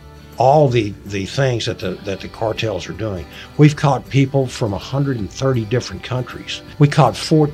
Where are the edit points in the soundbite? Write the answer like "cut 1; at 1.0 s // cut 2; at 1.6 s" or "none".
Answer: cut 1; at 6.6 s